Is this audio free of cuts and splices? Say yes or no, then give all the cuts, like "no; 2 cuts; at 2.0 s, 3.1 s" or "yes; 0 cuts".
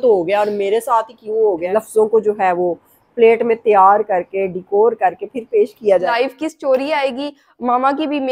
no; 2 cuts; at 1.7 s, 6.1 s